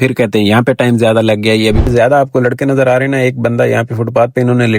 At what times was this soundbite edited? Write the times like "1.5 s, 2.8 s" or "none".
1.8 s